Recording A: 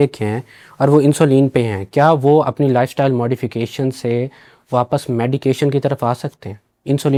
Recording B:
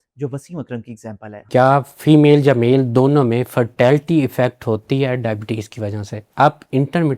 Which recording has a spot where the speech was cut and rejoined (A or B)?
B